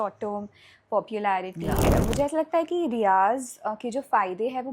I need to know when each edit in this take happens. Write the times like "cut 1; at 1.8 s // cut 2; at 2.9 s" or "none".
cut 1; at 1.9 s